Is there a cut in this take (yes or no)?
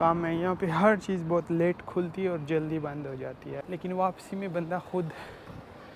yes